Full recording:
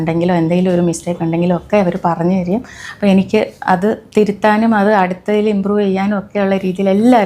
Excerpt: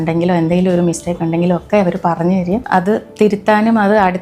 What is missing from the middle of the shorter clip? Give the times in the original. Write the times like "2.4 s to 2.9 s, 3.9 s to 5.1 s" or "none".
2.6 s to 3.6 s